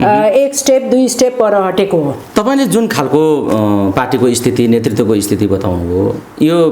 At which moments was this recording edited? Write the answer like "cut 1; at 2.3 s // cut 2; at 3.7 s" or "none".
none